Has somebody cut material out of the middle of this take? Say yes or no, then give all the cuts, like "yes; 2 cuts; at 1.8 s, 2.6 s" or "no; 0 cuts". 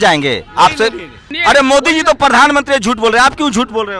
yes; 1 cut; at 1.2 s